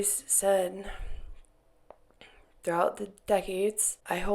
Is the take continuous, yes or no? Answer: yes